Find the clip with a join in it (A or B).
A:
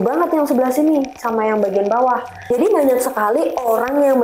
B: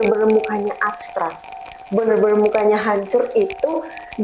A